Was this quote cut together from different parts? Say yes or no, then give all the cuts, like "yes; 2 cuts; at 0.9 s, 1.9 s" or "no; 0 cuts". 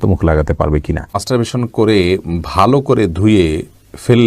yes; 1 cut; at 1.2 s